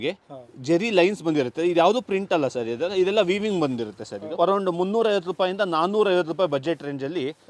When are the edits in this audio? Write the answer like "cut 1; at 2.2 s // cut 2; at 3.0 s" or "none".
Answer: cut 1; at 4.2 s